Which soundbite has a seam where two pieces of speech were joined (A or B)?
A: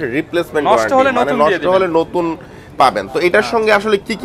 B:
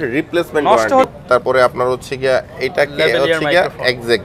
B